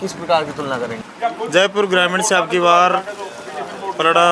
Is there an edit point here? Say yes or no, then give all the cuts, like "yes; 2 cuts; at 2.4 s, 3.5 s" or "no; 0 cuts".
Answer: yes; 1 cut; at 1.0 s